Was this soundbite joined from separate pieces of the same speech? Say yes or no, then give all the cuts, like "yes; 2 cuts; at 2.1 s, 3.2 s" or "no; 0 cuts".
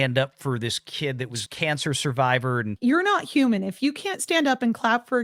yes; 2 cuts; at 1.4 s, 2.7 s